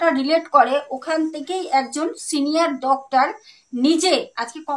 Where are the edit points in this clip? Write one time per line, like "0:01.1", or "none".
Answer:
none